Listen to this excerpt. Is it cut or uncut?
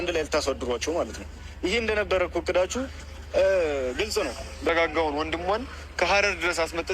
cut